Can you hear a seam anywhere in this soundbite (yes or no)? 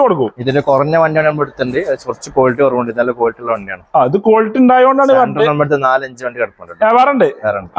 no